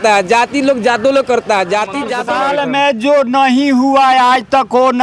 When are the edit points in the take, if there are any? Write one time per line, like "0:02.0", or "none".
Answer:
0:02.2

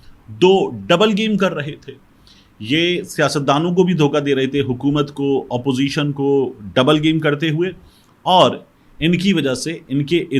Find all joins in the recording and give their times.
none

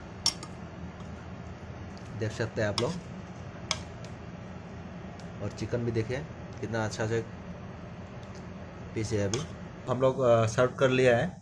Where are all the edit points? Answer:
0:09.9

